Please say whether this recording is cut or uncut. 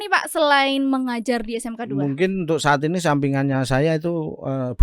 uncut